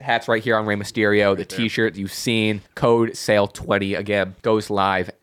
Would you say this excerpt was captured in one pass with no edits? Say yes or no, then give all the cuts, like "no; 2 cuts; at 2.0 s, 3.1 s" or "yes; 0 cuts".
no; 2 cuts; at 2.7 s, 4.3 s